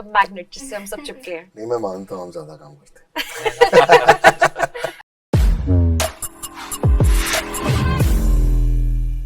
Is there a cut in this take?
yes; 1 cut; at 5.2 s

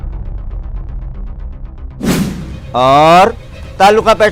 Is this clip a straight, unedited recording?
no; 1 cut; at 2.5 s

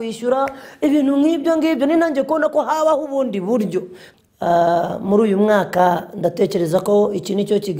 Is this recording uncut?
no; 1 cut; at 4.0 s

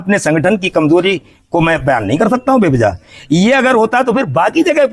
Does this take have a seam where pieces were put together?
no; 0 cuts

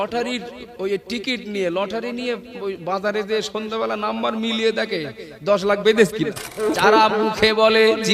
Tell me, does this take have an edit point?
yes; 1 cut; at 6.7 s

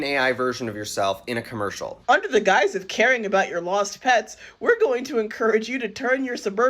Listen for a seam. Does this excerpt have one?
yes; 1 cut; at 1.9 s

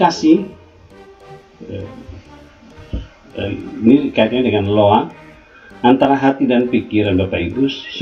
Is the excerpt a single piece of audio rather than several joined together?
yes; 0 cuts

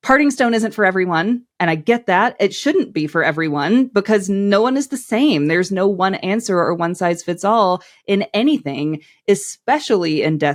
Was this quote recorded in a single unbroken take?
yes; 0 cuts

